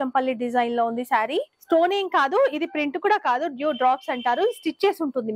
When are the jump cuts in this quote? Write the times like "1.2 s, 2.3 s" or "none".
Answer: 1.5 s